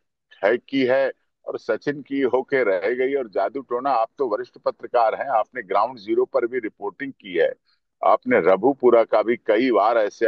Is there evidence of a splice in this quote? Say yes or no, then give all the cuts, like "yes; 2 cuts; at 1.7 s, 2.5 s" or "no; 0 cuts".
no; 0 cuts